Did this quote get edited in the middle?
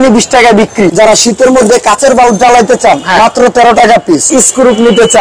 yes; 2 cuts; at 0.9 s, 4.3 s

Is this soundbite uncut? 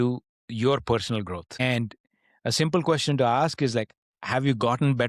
no; 1 cut; at 1.6 s

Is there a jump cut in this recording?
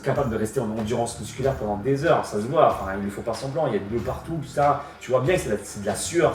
no; 0 cuts

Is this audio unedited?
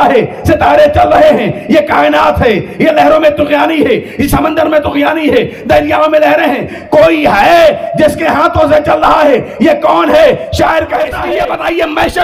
no; 1 cut; at 11.2 s

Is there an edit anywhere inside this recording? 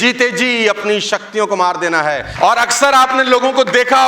yes; 1 cut; at 2.3 s

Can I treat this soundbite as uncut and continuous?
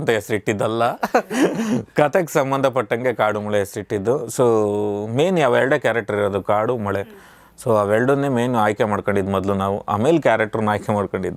yes; 0 cuts

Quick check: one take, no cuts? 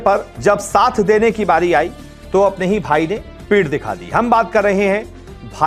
yes; 0 cuts

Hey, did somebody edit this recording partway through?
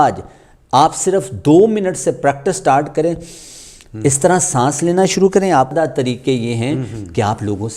yes; 1 cut; at 5.7 s

